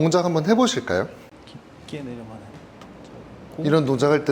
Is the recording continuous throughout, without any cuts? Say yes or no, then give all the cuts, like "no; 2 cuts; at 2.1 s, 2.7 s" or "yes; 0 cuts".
no; 1 cut; at 1.3 s